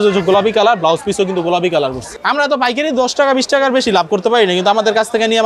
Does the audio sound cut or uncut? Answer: cut